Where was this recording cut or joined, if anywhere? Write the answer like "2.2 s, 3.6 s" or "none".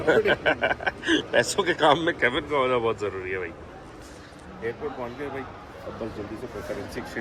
none